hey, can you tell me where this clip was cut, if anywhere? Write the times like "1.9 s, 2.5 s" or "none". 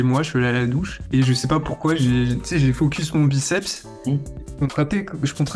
none